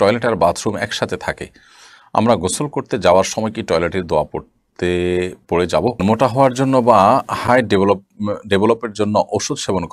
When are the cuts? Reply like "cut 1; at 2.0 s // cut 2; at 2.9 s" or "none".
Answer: cut 1; at 6.0 s